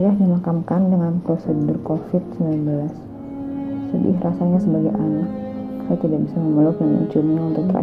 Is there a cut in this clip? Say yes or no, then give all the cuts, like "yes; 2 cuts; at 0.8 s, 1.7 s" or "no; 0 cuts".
no; 0 cuts